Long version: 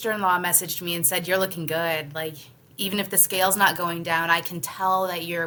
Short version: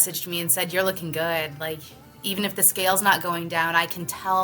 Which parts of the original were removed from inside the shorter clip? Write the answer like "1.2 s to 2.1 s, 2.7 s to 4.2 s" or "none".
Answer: none